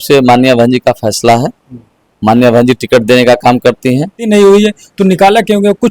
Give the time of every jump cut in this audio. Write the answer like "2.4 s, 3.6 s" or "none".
4.2 s